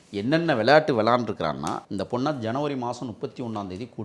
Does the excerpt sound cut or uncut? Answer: cut